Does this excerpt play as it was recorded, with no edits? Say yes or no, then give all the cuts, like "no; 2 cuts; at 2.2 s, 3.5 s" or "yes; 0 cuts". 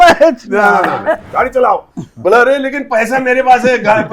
no; 1 cut; at 1.3 s